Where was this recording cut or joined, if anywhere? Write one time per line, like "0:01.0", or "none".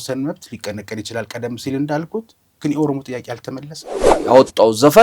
0:04.0